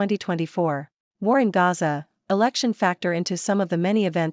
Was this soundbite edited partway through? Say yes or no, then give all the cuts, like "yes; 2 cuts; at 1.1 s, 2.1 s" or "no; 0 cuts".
yes; 1 cut; at 1.0 s